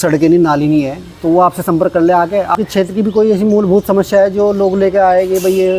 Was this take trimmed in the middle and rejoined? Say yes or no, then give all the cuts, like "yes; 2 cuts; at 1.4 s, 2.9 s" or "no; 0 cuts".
yes; 1 cut; at 2.5 s